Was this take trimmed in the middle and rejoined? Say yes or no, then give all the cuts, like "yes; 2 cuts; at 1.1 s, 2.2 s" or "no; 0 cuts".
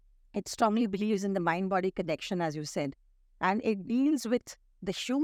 no; 0 cuts